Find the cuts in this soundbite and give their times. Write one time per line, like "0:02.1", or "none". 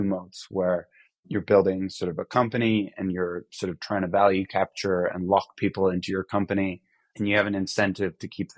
none

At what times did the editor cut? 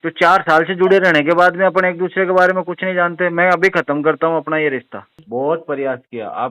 0:05.1

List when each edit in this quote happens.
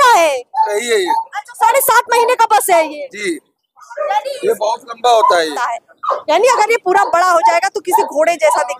0:05.6

